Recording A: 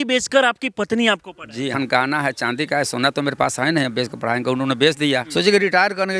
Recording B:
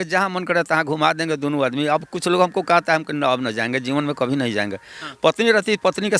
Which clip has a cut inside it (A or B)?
A